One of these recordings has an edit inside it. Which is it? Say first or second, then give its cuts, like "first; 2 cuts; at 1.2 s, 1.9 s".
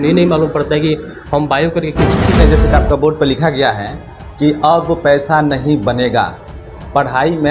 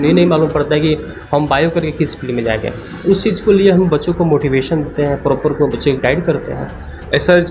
first; 1 cut; at 2.4 s